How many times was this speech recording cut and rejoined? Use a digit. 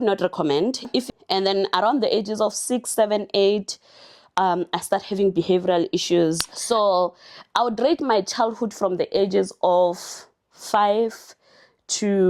2